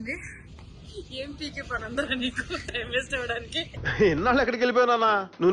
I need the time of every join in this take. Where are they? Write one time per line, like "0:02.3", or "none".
none